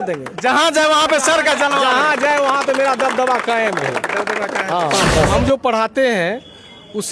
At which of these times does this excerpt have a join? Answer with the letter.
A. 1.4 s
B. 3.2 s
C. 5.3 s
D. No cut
C